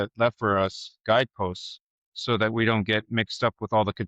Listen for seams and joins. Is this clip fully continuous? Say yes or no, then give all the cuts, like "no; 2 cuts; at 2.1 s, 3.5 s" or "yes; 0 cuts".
no; 1 cut; at 1.0 s